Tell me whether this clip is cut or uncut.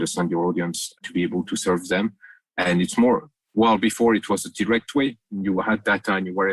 cut